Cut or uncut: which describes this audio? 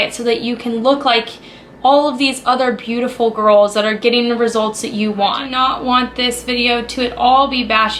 cut